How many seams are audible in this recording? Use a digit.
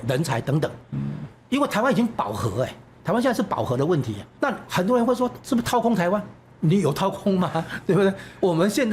2